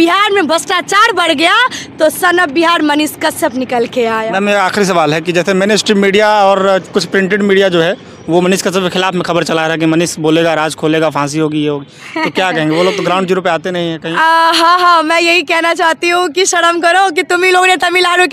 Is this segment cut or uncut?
uncut